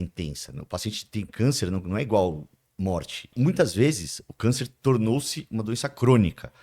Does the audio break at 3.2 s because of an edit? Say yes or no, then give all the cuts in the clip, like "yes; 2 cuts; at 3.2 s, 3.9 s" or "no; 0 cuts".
yes; 1 cut; at 3.2 s